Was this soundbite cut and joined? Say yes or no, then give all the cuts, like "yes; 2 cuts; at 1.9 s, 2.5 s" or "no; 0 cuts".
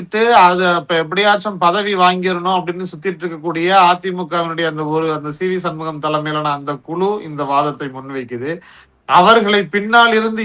no; 0 cuts